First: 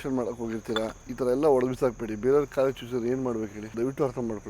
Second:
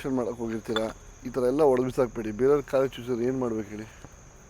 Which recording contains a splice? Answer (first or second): first